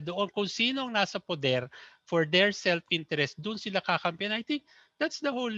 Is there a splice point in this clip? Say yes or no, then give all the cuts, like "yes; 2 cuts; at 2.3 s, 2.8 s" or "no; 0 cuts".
no; 0 cuts